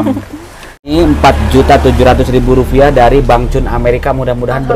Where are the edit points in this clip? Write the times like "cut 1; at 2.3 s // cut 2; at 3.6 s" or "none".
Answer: cut 1; at 0.9 s